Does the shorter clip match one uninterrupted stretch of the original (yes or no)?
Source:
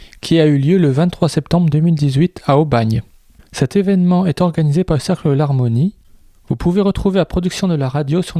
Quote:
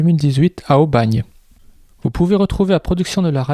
no